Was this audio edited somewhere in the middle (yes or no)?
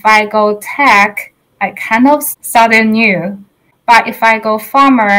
yes